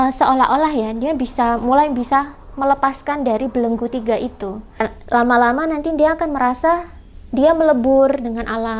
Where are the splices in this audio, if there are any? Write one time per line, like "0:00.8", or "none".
0:04.8